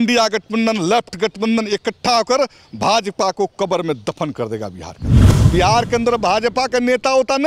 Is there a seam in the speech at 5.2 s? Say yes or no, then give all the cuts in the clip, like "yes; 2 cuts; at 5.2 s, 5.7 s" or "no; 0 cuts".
yes; 1 cut; at 5.2 s